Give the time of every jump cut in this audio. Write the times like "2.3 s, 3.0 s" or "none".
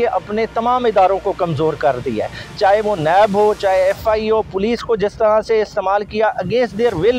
none